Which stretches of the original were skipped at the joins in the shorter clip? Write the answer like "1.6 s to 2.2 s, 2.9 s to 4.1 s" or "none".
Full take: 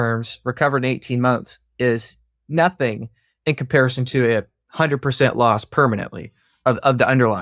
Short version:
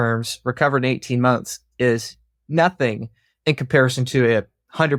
none